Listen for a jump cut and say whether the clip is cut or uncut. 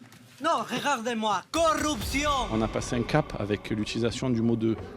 cut